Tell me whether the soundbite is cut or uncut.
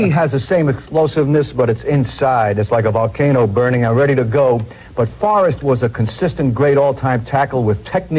uncut